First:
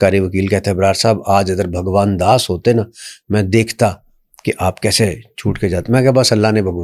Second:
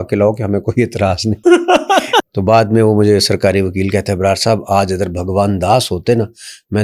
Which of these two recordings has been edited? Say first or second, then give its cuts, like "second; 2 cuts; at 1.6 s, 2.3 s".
second; 2 cuts; at 1.4 s, 2.3 s